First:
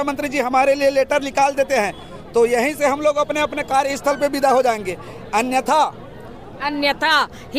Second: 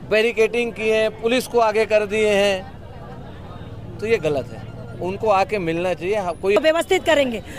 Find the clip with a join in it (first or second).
second